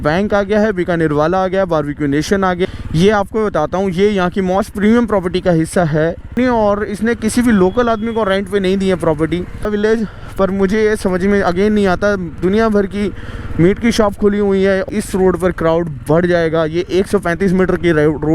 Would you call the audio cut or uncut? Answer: cut